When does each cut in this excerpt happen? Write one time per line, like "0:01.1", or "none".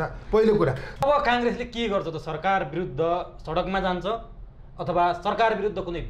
0:01.0